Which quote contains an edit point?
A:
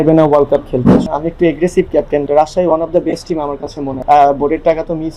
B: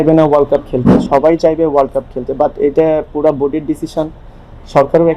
A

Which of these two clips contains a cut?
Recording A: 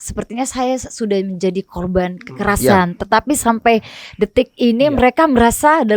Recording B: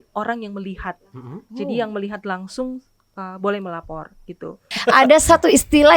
B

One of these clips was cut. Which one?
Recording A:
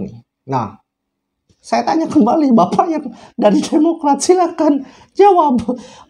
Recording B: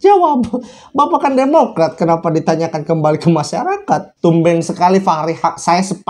B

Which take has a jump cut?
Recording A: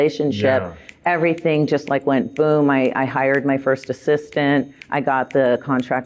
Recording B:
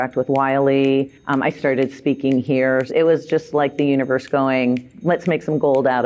B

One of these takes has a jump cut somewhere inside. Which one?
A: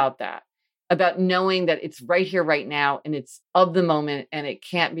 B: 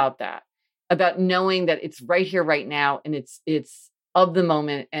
A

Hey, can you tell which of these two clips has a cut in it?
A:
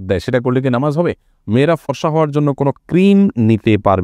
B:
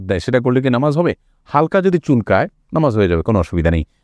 A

